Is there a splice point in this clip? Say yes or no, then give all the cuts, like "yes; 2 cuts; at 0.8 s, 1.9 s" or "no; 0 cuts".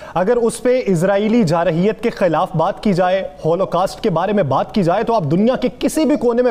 no; 0 cuts